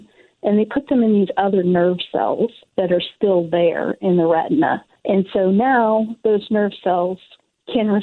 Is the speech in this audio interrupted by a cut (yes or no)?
yes